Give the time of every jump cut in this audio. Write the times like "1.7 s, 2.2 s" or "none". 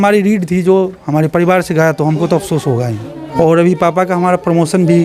3.2 s